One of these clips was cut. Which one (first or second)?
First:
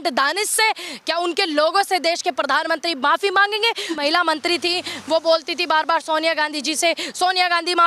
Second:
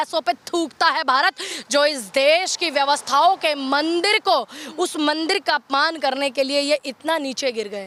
first